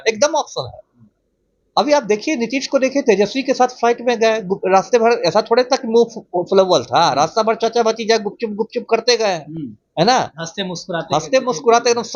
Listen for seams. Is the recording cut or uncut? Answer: uncut